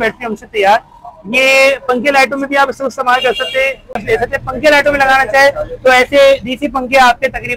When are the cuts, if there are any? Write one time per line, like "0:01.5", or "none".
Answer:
0:03.9